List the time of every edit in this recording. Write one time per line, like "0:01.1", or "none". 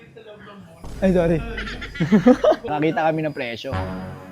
0:02.7